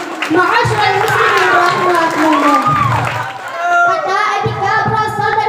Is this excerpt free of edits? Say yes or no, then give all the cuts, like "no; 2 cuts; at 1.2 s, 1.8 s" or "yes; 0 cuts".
no; 1 cut; at 3.3 s